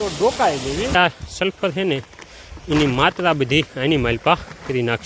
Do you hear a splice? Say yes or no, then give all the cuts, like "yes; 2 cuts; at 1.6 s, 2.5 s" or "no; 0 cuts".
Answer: yes; 1 cut; at 0.9 s